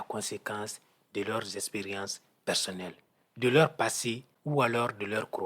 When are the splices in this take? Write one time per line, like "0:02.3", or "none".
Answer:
0:04.3